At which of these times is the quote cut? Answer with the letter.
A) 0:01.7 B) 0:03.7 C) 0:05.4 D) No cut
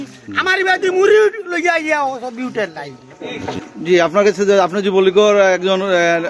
B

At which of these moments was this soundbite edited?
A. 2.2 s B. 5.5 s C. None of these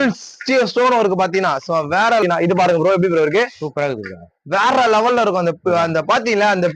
A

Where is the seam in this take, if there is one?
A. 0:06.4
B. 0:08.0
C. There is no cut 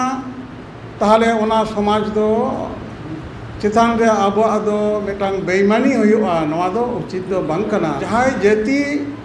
B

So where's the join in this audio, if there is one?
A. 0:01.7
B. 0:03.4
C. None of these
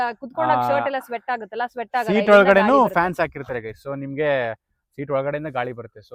C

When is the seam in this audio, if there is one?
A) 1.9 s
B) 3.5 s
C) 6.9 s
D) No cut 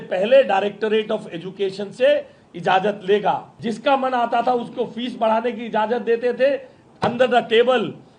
B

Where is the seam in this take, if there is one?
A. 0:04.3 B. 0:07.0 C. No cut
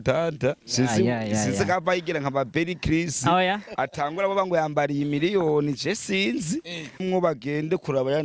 B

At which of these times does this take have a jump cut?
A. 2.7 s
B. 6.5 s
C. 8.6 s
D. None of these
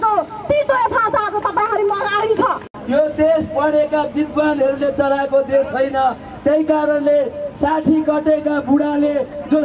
A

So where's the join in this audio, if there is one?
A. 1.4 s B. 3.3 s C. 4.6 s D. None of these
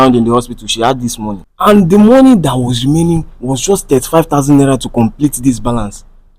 A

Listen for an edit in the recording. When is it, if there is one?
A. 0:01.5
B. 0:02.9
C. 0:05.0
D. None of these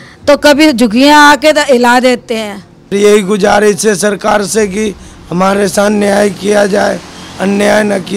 B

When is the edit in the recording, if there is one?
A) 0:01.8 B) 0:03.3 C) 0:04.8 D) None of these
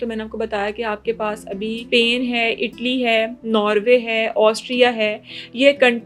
A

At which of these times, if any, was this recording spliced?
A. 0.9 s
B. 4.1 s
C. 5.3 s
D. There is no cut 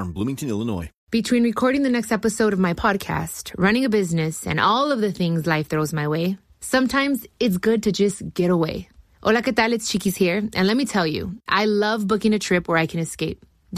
A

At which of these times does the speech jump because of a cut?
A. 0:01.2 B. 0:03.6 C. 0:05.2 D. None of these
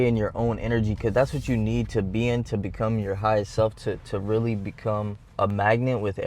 C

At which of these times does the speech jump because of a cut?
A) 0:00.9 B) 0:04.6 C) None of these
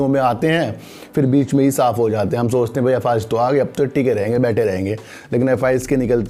C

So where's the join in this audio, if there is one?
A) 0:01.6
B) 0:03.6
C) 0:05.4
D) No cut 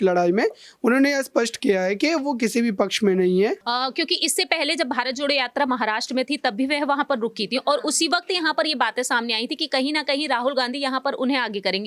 B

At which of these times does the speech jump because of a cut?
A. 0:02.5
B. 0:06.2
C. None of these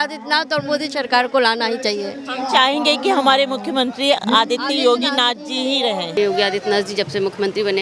B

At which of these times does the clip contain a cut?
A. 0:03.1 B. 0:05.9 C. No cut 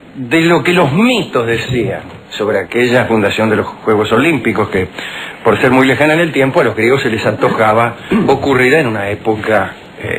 B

